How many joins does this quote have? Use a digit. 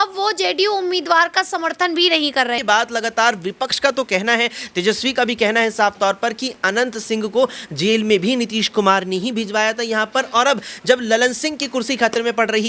1